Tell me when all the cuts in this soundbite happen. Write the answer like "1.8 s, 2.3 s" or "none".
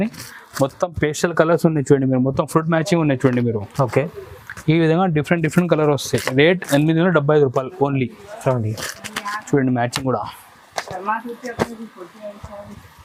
none